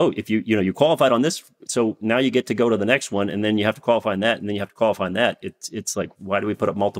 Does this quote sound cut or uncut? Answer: uncut